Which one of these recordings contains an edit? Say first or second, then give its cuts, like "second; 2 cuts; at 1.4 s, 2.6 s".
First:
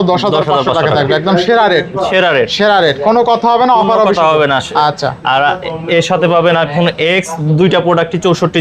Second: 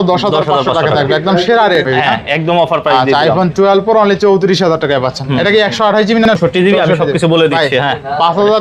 second; 2 cuts; at 1.8 s, 6.3 s